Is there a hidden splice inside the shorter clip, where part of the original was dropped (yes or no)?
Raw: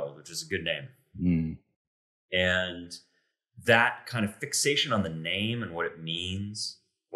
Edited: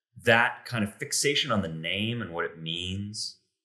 no